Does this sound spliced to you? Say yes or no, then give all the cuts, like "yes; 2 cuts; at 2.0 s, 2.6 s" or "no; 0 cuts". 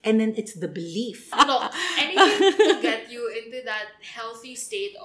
yes; 1 cut; at 1.3 s